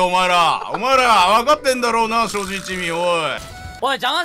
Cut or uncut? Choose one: cut